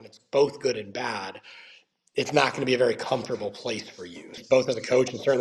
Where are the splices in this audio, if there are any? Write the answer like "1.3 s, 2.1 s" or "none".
4.4 s